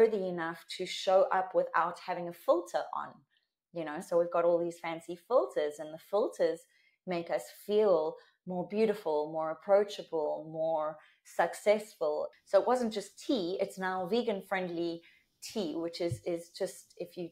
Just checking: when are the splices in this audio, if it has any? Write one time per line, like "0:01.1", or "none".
0:12.3